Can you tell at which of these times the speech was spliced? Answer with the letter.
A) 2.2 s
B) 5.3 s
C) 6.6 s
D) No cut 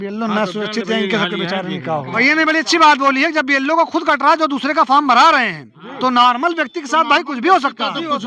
A